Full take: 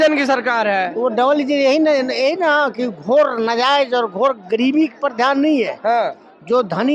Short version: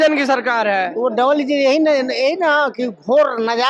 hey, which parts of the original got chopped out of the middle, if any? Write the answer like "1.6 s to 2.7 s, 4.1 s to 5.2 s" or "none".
none